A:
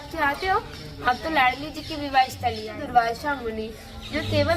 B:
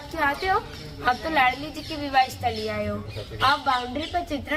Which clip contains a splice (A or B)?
A